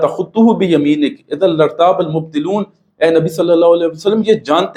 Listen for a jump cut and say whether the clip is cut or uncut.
uncut